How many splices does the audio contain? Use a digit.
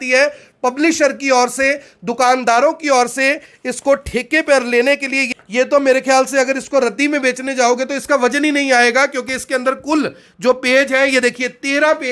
1